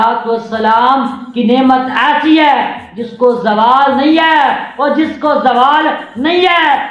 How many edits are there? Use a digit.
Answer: 0